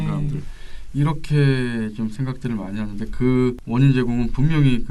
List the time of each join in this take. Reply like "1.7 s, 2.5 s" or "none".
3.6 s